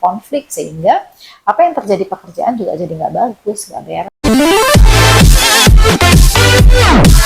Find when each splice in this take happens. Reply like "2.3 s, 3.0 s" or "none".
4.2 s